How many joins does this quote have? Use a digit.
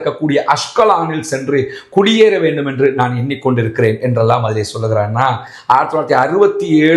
0